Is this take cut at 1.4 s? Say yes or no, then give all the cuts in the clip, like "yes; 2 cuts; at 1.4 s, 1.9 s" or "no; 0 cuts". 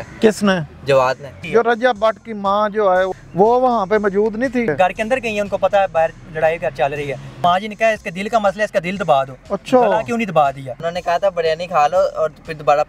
yes; 4 cuts; at 1.4 s, 4.7 s, 7.4 s, 10.9 s